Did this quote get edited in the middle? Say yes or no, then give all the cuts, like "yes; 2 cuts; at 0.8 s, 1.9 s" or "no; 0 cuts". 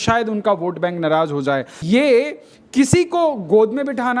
yes; 1 cut; at 1.8 s